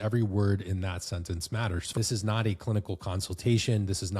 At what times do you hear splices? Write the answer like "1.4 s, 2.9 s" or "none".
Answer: 1.8 s